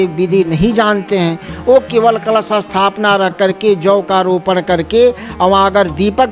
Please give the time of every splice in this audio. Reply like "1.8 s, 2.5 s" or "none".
none